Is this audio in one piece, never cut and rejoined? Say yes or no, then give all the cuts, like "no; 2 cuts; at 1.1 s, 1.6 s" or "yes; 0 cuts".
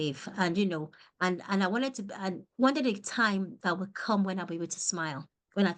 yes; 0 cuts